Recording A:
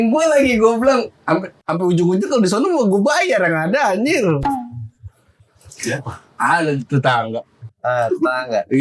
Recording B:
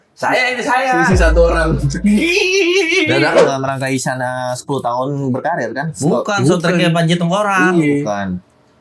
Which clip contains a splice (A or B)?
B